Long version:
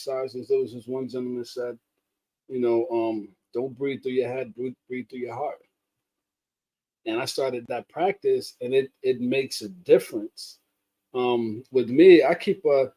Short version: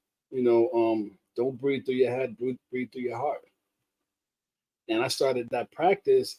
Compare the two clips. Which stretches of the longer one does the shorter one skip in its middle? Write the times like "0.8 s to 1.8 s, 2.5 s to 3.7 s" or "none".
none

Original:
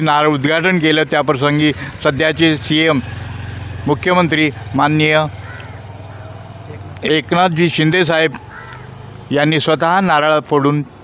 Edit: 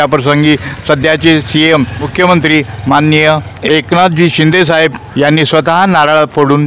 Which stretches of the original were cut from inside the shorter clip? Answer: 3.2 s to 3.9 s, 5.4 s to 6.9 s, 8.4 s to 9.2 s

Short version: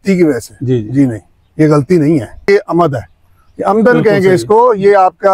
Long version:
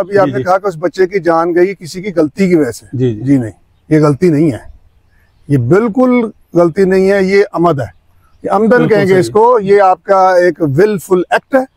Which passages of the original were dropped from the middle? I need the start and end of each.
4.8 s to 7.3 s

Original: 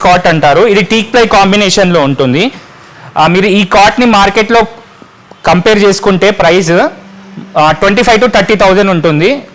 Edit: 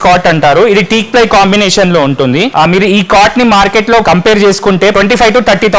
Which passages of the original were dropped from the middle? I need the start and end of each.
2.5 s to 3.1 s, 4.7 s to 5.4 s, 6.3 s to 7.8 s

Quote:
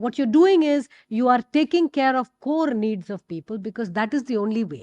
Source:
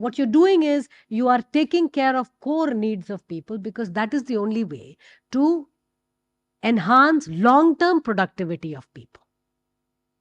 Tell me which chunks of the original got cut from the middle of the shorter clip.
none

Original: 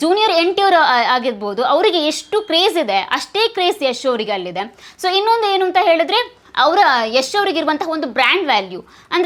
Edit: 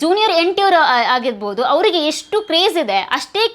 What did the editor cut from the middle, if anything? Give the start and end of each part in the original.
none

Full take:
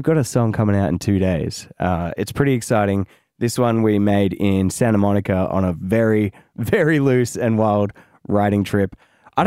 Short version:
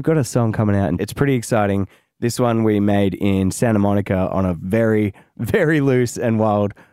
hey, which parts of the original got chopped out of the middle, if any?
1.0 s to 2.2 s

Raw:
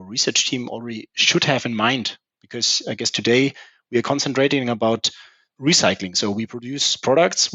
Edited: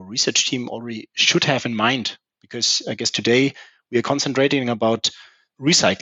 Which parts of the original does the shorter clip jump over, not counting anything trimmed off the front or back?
none

